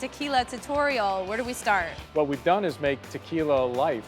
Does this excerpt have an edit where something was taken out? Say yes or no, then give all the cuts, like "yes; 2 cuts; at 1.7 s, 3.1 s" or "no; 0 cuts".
yes; 1 cut; at 2.0 s